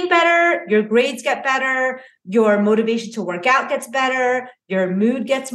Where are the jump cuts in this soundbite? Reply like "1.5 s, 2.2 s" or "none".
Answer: none